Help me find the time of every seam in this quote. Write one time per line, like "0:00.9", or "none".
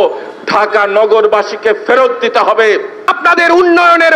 0:03.1